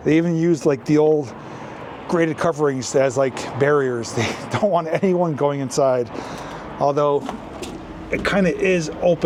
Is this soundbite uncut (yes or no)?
yes